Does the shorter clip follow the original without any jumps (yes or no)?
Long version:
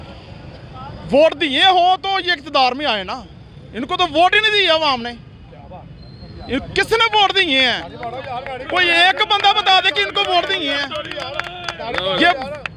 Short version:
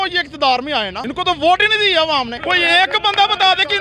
no